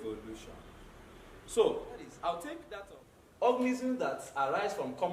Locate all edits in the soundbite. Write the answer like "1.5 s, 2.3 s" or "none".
2.7 s